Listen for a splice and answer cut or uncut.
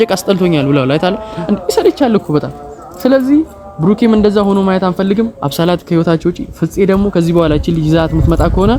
uncut